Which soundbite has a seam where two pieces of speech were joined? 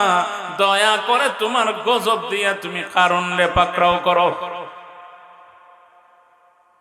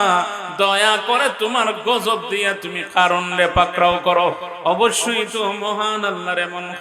second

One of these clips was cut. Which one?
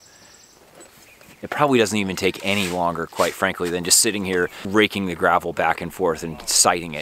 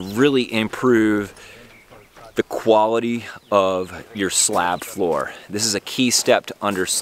first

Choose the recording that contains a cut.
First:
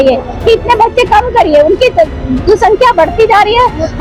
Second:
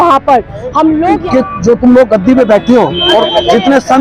second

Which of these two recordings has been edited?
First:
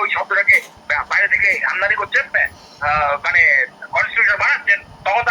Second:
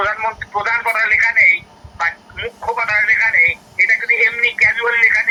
first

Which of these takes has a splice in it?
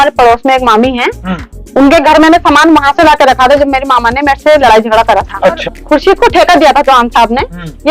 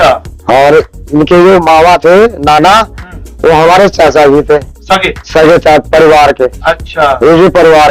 first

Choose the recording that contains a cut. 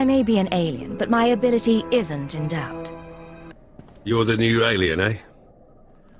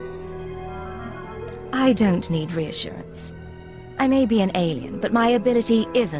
first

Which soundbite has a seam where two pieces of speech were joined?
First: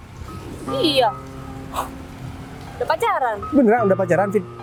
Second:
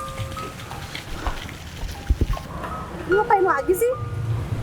second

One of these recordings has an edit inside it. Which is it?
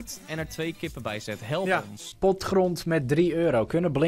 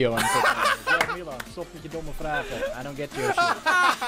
first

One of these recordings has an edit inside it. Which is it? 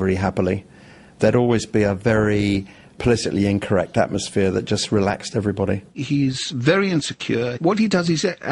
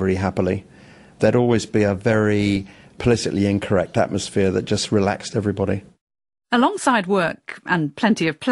first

